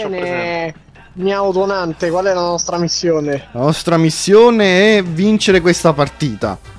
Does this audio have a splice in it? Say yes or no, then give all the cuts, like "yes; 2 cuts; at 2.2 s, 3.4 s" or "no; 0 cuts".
no; 0 cuts